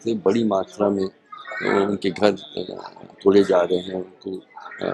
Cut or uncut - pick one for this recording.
uncut